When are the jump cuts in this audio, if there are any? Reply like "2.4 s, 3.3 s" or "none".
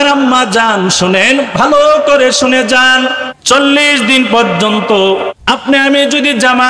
3.3 s, 5.3 s